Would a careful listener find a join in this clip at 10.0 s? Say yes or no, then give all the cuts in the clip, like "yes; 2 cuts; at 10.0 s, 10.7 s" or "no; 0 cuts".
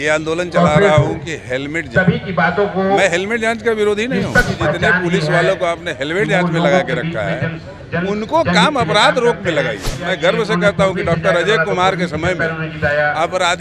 yes; 2 cuts; at 4.5 s, 10.0 s